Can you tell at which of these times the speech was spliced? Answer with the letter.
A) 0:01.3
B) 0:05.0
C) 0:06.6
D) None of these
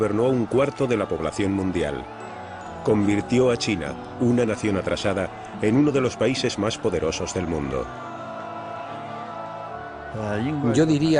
D